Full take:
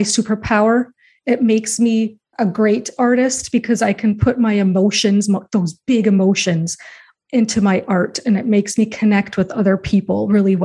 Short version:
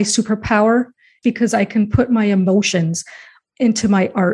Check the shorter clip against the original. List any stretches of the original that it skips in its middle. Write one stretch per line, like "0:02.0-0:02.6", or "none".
0:01.1-0:03.4
0:05.0-0:06.4